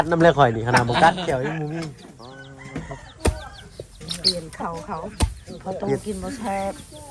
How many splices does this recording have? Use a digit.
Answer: 1